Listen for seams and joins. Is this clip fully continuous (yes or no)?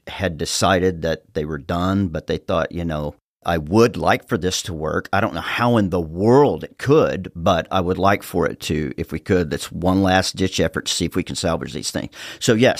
yes